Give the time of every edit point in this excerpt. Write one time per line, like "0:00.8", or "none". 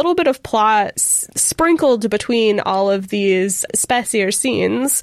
0:01.0

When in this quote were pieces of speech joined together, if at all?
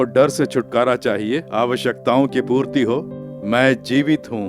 0:01.5

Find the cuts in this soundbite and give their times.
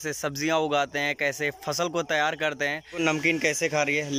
0:03.0

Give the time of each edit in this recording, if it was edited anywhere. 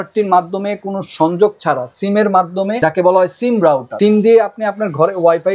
0:02.8
0:03.9

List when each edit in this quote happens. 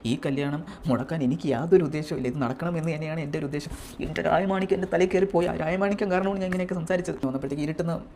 0:07.2

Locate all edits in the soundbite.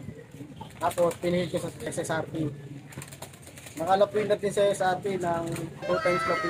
0:01.8

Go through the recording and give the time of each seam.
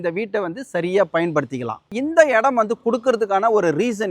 0:01.9

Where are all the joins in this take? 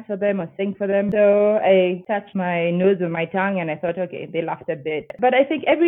0:01.1
0:02.3
0:05.1

